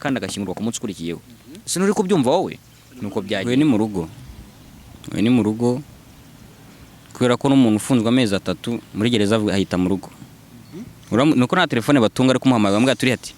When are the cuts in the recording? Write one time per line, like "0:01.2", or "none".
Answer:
0:03.4